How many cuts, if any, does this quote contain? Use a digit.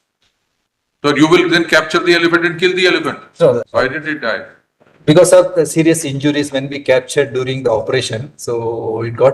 1